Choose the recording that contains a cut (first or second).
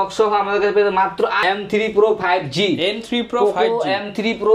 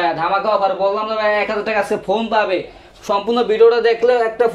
first